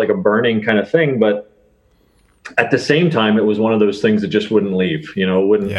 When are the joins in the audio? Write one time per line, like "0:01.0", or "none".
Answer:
none